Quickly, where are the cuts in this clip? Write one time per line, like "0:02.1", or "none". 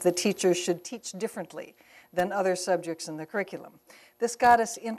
none